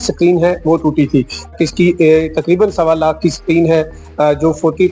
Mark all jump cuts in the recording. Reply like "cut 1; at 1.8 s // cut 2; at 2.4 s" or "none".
cut 1; at 1.5 s

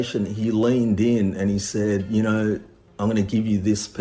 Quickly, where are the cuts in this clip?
none

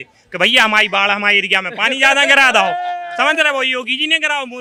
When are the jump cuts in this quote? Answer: none

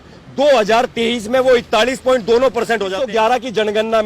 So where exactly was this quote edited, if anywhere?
cut 1; at 3.0 s

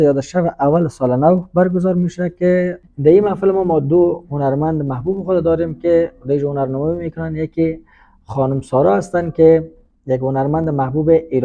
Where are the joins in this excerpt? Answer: cut 1; at 2.8 s

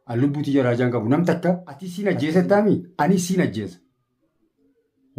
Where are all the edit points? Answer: cut 1; at 2.0 s

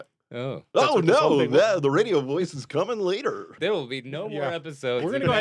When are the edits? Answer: cut 1; at 0.7 s // cut 2; at 3.5 s

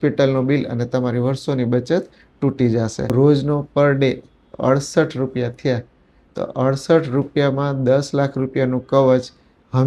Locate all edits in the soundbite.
cut 1; at 3.1 s

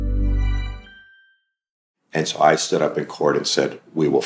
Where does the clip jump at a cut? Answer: cut 1; at 2.0 s

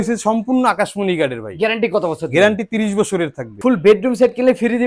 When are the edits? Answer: none

